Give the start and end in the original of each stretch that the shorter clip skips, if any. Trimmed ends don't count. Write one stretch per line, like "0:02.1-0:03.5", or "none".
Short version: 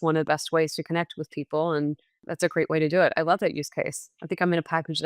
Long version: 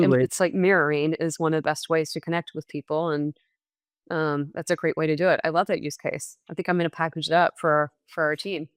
0:03.7-0:04.6

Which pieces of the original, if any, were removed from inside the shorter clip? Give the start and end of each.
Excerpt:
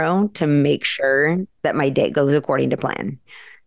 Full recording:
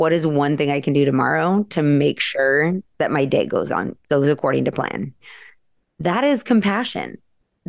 0:03.5-0:04.1

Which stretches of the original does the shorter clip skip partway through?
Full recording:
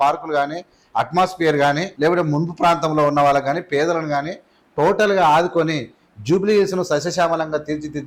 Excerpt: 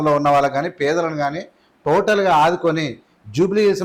none

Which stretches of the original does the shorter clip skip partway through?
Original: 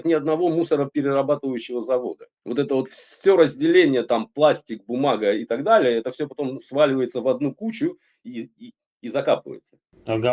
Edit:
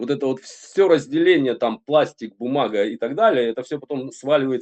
none

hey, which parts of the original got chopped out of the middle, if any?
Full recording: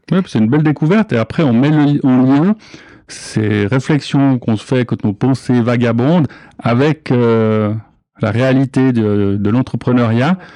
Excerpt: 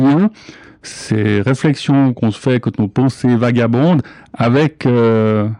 none

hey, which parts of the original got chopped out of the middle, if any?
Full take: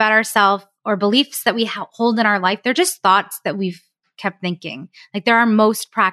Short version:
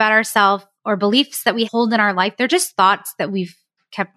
0:01.7-0:02.0

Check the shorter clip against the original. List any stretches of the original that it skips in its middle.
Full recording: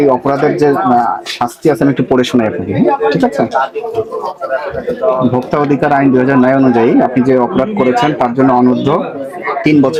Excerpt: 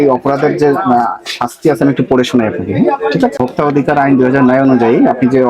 0:03.4-0:05.3

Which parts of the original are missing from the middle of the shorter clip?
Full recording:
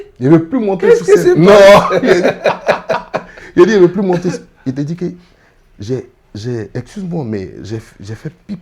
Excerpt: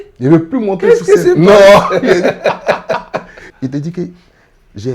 0:03.4-0:04.4

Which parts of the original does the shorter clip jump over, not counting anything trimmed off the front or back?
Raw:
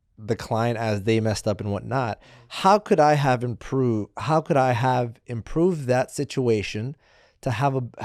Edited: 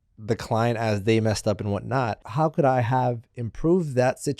0:02.2-0:04.1

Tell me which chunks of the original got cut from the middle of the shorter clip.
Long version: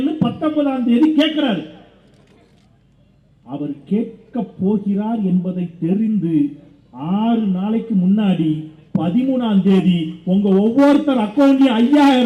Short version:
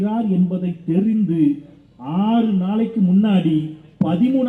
none

